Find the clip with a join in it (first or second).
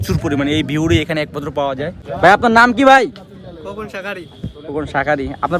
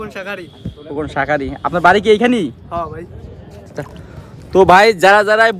first